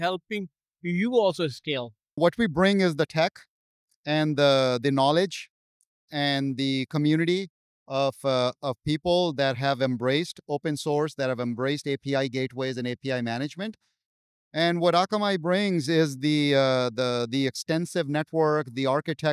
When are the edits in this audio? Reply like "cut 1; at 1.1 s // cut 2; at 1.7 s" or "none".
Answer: cut 1; at 2.2 s